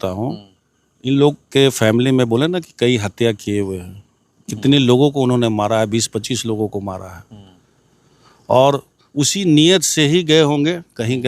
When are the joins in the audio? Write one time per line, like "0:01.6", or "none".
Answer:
none